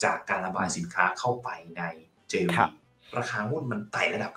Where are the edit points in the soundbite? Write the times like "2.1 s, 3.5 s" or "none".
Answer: 2.9 s

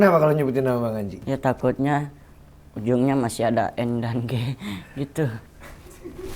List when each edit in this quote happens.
1.3 s, 5.5 s

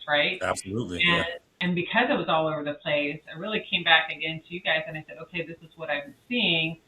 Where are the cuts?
1.5 s

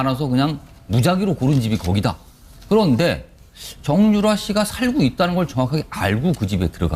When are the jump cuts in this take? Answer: none

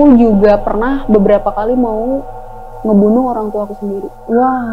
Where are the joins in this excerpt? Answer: none

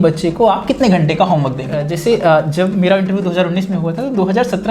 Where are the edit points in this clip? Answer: 1.9 s

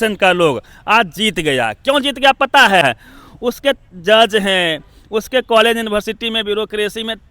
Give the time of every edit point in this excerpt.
2.8 s

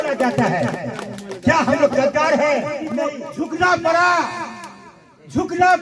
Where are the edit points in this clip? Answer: 3.2 s

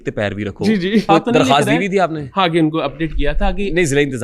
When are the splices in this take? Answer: 1.0 s

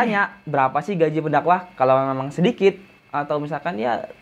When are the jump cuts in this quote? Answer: none

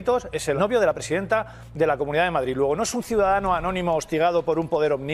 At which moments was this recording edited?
none

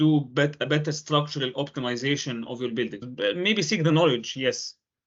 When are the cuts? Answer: 3.0 s

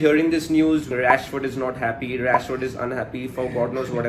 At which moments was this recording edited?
0.9 s

